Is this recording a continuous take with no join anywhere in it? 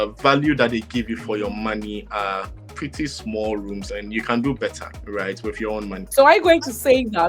no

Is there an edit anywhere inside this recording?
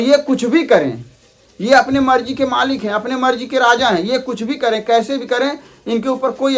no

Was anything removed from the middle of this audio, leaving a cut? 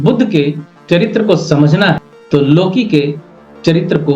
yes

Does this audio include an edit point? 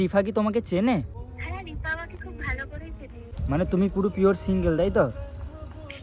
yes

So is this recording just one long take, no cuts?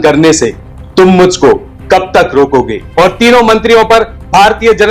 no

